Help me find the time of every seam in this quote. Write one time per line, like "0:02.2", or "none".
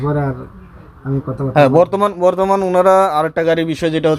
none